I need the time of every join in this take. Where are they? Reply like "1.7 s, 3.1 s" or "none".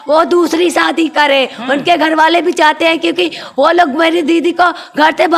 none